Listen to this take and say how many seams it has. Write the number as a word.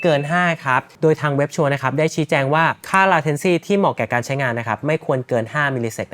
one